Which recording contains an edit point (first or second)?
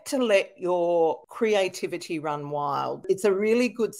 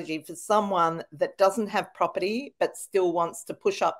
first